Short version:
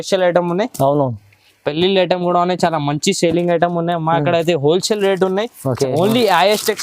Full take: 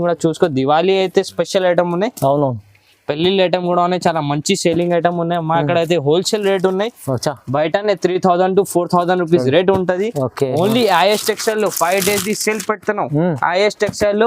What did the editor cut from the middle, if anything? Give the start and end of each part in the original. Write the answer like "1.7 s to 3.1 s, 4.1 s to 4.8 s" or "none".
7.2 s to 10.3 s